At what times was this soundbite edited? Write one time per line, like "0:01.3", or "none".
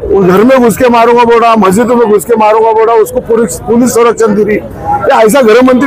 none